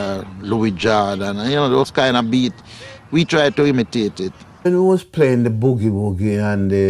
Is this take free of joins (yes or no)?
no